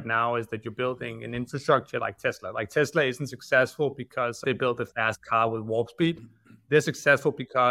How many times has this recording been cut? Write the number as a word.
one